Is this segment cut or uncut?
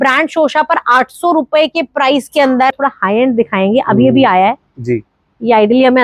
cut